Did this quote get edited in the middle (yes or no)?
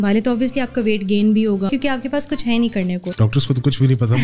yes